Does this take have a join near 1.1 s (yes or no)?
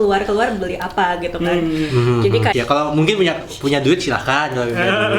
no